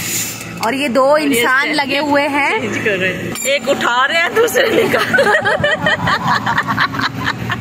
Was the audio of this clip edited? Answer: yes; 1 cut; at 3.3 s

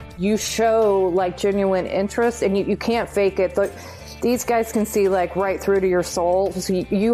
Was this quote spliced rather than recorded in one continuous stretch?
no; 0 cuts

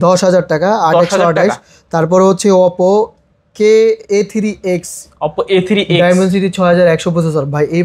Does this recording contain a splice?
no; 0 cuts

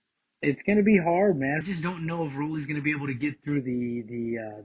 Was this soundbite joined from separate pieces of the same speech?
yes; 1 cut; at 1.6 s

